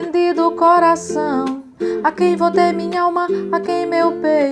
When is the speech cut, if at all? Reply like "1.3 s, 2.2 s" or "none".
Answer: none